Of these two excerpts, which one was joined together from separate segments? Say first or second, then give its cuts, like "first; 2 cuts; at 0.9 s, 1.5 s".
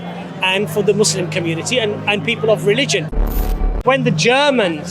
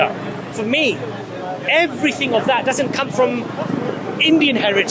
first; 1 cut; at 3.3 s